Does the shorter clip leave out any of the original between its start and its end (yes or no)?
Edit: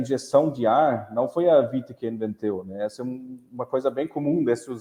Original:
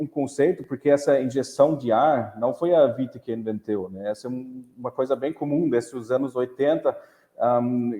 no